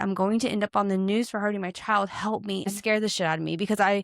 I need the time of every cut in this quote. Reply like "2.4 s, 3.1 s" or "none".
2.7 s